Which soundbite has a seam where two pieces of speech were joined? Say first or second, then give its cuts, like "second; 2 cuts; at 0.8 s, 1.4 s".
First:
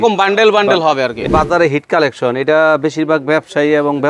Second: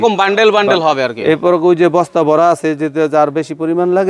first; 1 cut; at 1.2 s